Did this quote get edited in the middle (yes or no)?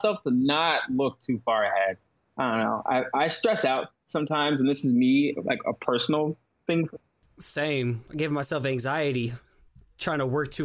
no